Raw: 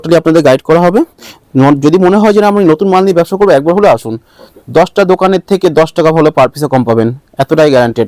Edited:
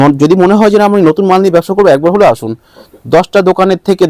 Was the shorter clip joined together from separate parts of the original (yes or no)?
no